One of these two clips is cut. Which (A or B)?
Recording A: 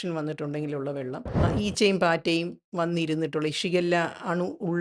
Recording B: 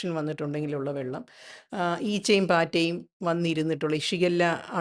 A